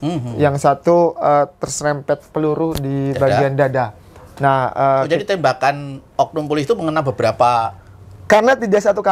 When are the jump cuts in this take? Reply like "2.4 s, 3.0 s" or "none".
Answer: none